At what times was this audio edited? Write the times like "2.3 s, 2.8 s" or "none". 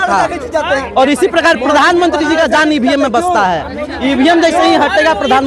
none